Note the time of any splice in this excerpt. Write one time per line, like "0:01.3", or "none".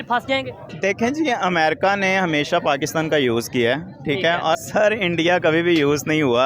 0:04.6